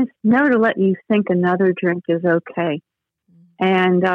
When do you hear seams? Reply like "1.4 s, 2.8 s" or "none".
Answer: none

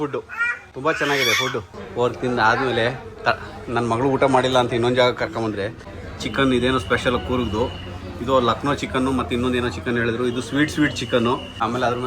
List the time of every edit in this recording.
1.8 s

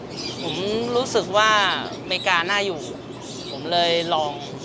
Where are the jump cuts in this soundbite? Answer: none

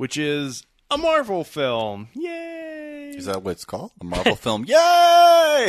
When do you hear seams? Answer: 3.9 s

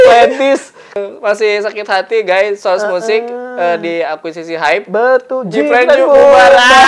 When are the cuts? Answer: 1.0 s

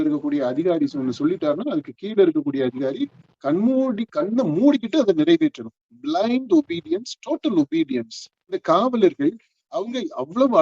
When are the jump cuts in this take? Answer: 8.6 s

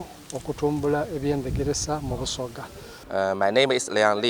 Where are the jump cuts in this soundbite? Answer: 3.0 s

